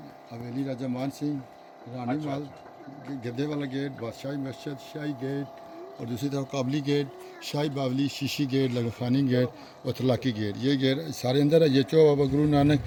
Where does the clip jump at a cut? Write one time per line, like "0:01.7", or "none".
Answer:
none